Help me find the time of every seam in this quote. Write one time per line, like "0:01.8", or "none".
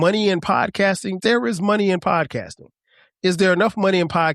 0:01.2